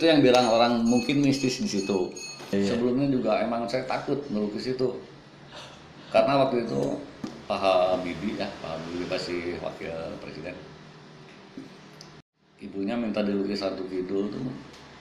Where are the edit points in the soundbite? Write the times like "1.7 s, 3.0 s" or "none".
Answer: 2.5 s